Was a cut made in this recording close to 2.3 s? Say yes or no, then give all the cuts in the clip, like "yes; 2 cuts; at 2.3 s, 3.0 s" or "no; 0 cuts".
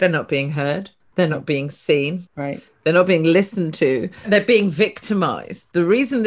yes; 3 cuts; at 1.0 s, 2.3 s, 4.3 s